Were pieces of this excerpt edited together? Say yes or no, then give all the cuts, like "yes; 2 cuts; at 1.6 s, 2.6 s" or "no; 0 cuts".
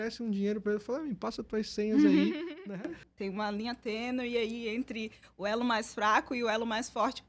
yes; 1 cut; at 2.6 s